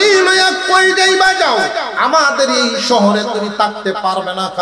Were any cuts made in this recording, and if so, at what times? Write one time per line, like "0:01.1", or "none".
0:01.9